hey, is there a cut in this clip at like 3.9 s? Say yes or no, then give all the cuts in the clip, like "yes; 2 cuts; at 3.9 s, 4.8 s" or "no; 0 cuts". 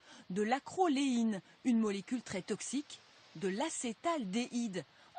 no; 1 cut; at 2.3 s